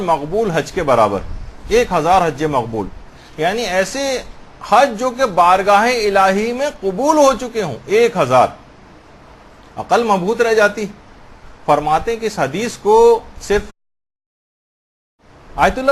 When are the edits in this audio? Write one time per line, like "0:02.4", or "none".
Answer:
none